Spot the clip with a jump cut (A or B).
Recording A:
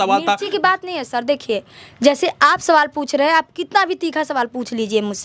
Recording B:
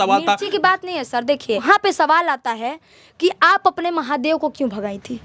B